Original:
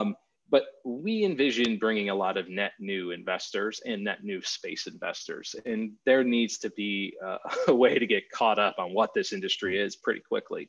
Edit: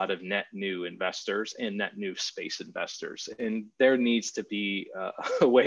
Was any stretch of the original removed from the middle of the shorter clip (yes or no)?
no